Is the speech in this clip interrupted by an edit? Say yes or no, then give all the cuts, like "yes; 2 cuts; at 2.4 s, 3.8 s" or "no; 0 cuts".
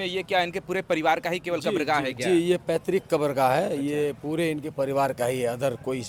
no; 0 cuts